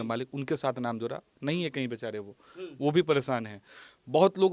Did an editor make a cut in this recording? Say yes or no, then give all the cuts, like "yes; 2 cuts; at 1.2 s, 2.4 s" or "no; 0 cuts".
no; 0 cuts